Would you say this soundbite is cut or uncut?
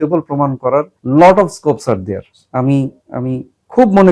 uncut